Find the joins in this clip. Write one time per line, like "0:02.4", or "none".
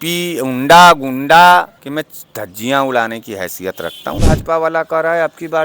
0:01.8
0:04.2